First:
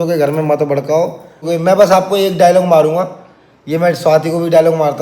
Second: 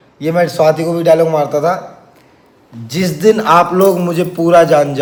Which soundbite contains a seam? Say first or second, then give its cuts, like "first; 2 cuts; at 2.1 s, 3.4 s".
first; 1 cut; at 1.5 s